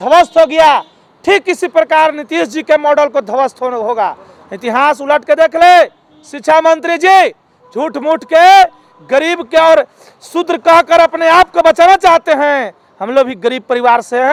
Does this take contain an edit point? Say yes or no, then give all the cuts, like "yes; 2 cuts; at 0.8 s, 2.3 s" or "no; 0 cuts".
no; 0 cuts